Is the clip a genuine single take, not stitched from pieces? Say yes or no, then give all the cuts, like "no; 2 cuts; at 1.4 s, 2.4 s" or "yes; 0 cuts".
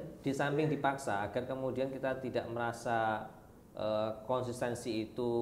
yes; 0 cuts